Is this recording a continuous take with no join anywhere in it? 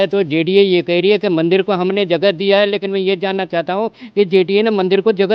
yes; 0 cuts

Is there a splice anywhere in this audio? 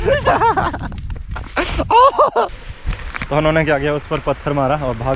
yes; 1 cut; at 2.6 s

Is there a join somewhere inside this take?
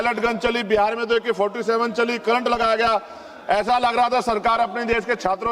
no; 0 cuts

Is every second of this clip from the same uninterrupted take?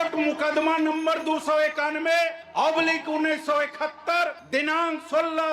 yes; 0 cuts

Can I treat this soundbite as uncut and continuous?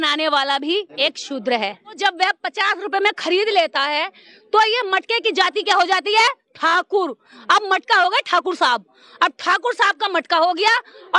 no; 2 cuts; at 0.9 s, 2.0 s

